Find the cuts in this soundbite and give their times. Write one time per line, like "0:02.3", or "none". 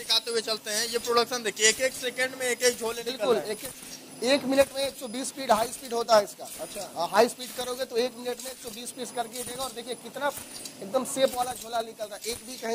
none